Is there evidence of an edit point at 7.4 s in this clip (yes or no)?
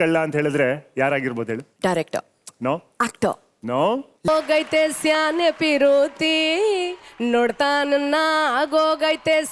no